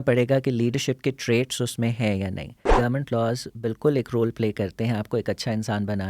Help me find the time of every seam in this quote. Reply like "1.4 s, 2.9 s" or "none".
2.7 s